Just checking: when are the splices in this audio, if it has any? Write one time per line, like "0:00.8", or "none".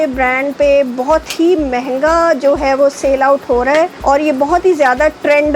0:04.0